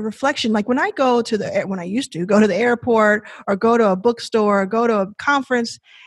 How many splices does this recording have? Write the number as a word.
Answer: one